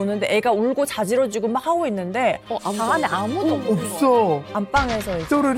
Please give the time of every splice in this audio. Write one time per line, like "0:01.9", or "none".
0:04.5